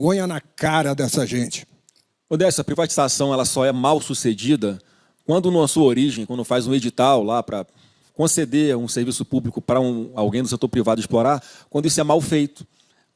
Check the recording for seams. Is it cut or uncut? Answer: uncut